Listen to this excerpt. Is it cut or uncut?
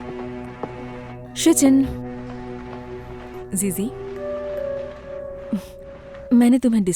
uncut